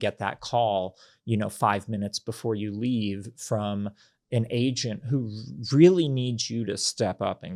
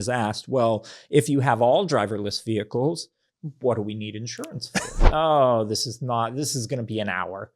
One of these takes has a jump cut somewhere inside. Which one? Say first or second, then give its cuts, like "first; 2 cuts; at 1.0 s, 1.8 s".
second; 1 cut; at 5.0 s